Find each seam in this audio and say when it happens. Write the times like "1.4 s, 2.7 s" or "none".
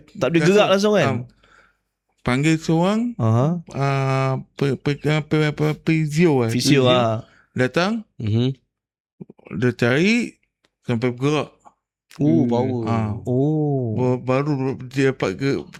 none

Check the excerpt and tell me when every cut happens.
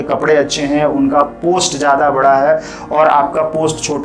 none

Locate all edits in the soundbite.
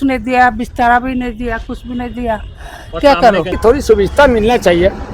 3.5 s

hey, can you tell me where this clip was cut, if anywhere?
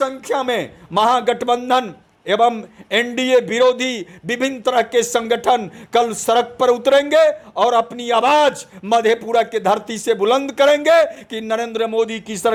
none

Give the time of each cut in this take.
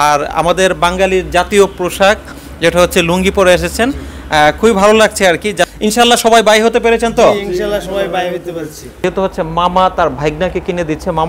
5.6 s, 9.0 s

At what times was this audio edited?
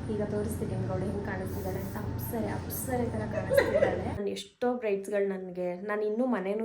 4.2 s

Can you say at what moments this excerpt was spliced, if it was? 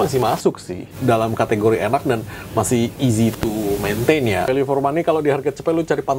0.9 s, 4.5 s

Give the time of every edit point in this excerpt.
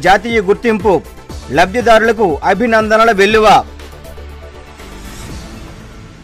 none

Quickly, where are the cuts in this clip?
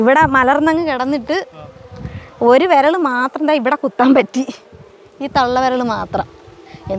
none

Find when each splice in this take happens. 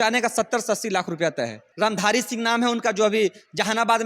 1.6 s

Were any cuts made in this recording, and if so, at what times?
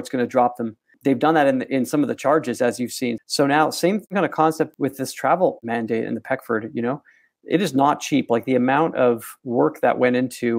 3.2 s

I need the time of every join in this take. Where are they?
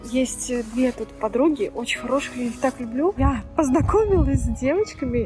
3.2 s

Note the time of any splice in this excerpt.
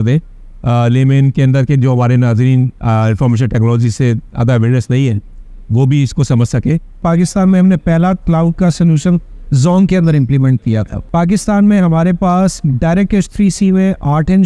7.0 s, 11.0 s

